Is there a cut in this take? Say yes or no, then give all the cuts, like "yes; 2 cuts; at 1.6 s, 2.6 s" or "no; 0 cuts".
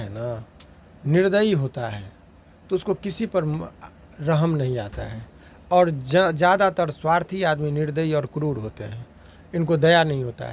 no; 0 cuts